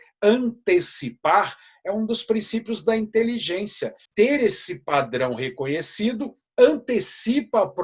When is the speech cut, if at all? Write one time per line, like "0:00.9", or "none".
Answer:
0:04.0